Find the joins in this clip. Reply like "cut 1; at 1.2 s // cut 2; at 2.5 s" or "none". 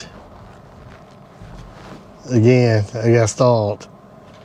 none